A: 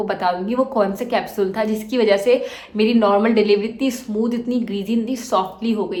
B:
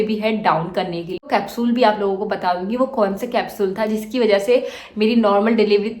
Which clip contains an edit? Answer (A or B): B